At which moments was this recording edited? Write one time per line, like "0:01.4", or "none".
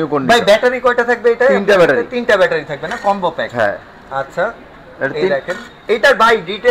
none